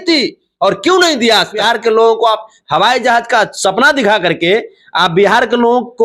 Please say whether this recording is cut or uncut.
cut